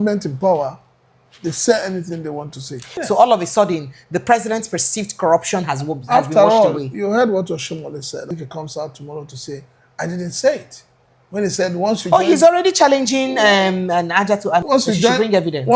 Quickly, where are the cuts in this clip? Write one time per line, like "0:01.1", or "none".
0:03.0
0:08.3
0:14.6